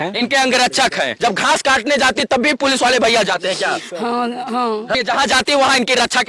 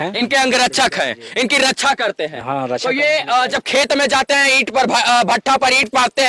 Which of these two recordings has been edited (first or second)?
first